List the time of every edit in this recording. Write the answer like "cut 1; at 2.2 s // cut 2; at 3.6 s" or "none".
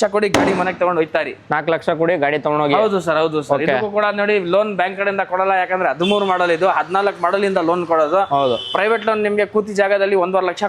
none